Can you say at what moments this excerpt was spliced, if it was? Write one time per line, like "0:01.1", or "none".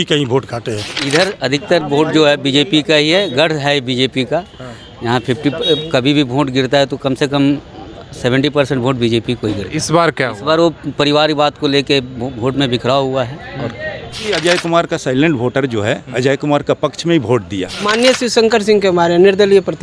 0:01.0
0:14.3
0:17.8